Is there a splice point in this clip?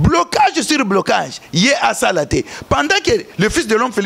no; 0 cuts

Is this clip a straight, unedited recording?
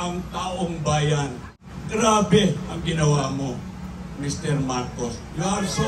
no; 1 cut; at 1.5 s

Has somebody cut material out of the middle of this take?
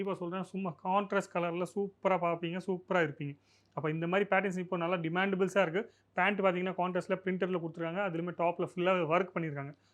no; 0 cuts

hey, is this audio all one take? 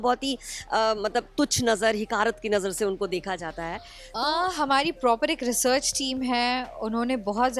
no; 1 cut; at 4.0 s

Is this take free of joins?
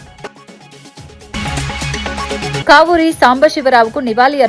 no; 1 cut; at 1.3 s

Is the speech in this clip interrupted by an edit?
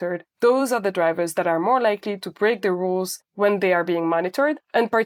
no; 0 cuts

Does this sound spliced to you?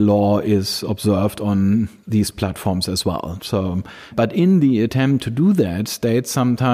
yes; 2 cuts; at 2.0 s, 4.1 s

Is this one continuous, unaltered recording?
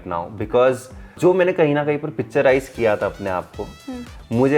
no; 1 cut; at 1.2 s

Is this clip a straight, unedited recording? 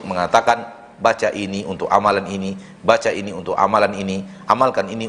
yes; 0 cuts

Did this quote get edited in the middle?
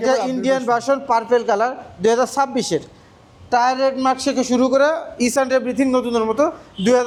no; 0 cuts

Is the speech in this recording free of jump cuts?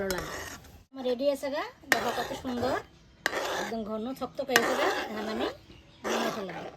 no; 1 cut; at 1.0 s

